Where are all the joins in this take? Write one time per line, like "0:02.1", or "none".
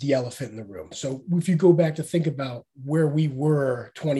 0:01.0